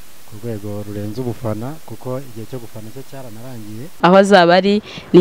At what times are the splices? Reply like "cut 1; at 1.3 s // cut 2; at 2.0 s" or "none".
cut 1; at 3.9 s

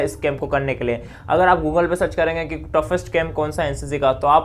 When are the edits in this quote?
none

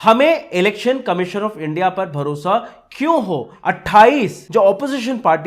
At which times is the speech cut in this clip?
cut 1; at 3.5 s // cut 2; at 4.4 s

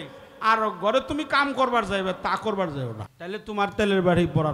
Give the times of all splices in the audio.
cut 1; at 3.1 s

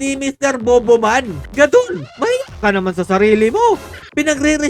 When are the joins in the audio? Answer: cut 1; at 1.4 s

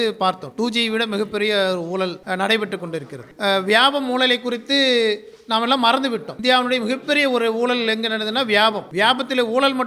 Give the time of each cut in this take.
cut 1; at 2.2 s // cut 2; at 3.2 s // cut 3; at 6.3 s // cut 4; at 8.8 s

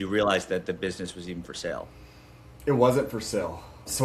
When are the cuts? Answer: none

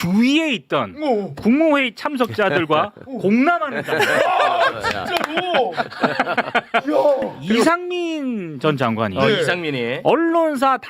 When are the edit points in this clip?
cut 1; at 7.4 s

